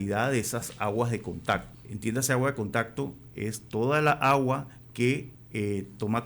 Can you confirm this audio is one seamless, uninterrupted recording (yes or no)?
no